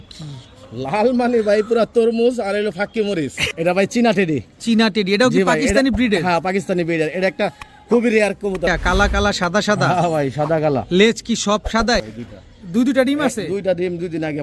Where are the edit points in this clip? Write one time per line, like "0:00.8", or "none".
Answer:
0:03.5
0:08.7
0:12.0